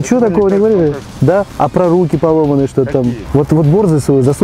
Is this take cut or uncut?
cut